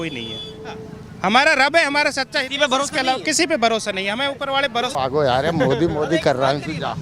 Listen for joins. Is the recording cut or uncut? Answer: cut